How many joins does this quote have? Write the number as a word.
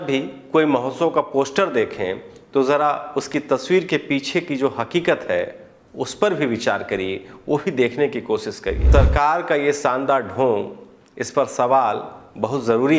one